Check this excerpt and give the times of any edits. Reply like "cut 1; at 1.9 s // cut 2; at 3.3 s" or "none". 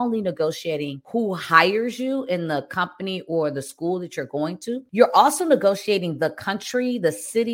cut 1; at 1.0 s // cut 2; at 4.9 s